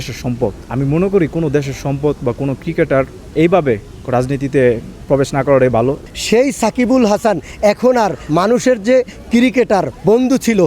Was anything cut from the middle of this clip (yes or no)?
yes